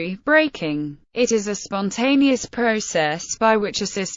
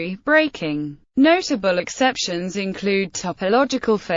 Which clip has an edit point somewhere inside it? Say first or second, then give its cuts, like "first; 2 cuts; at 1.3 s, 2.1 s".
second; 1 cut; at 0.9 s